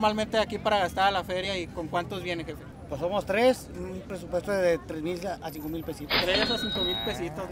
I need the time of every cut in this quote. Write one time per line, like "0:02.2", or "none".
none